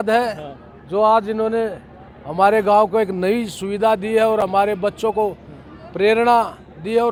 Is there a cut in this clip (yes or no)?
no